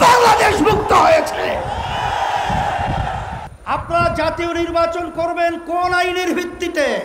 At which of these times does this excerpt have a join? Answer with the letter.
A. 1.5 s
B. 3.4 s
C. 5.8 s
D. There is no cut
B